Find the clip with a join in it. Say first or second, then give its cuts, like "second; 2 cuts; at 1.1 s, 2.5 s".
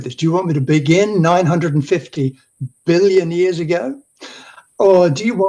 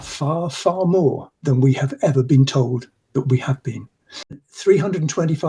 second; 1 cut; at 4.5 s